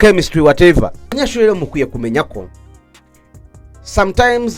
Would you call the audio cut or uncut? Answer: cut